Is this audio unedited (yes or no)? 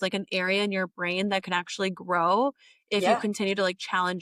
yes